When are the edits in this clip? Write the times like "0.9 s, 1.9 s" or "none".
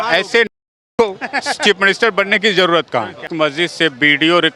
3.3 s